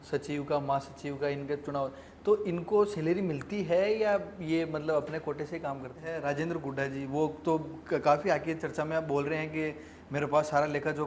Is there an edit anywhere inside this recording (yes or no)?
yes